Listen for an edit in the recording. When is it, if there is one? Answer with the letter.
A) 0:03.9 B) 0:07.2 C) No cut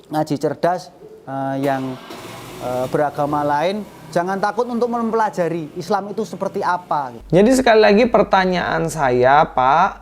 B